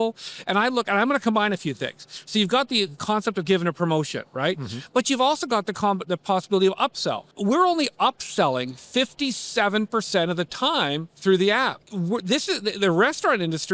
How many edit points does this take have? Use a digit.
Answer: 2